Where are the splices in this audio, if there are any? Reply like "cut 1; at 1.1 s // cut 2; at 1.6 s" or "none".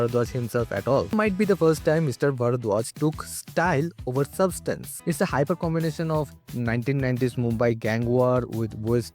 cut 1; at 1.1 s // cut 2; at 4.9 s